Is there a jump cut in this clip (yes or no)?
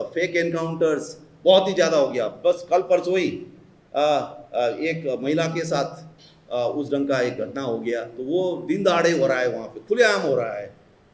no